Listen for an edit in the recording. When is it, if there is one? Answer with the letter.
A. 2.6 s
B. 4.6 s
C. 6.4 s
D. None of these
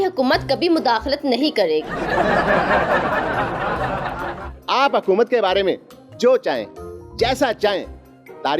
B